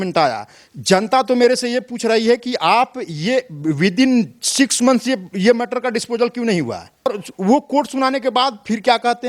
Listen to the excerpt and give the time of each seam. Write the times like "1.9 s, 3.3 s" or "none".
7.1 s